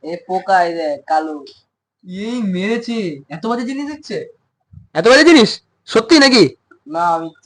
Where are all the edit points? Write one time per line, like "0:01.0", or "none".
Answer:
none